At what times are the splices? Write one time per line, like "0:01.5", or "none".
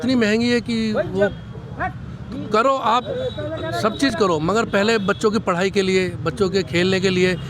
none